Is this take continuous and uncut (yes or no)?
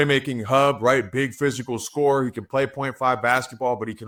yes